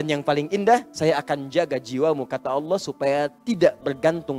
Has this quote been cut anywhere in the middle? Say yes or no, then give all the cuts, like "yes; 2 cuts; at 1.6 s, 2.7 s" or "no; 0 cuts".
yes; 1 cut; at 0.9 s